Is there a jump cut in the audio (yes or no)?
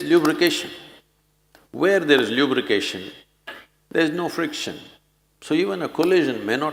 no